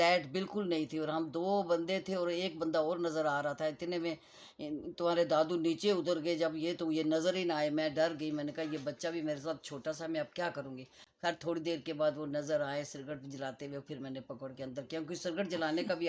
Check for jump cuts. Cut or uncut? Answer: uncut